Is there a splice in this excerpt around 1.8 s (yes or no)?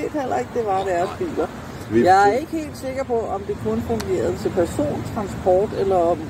yes